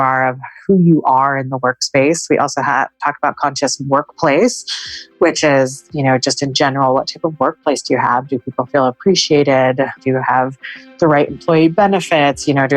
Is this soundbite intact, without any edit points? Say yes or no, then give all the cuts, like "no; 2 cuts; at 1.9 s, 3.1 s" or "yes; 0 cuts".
no; 1 cut; at 10.0 s